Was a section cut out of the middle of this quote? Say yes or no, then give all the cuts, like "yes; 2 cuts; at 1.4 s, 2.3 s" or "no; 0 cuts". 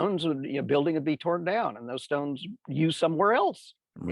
no; 0 cuts